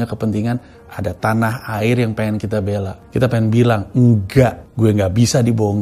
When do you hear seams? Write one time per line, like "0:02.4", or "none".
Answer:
0:03.0
0:04.6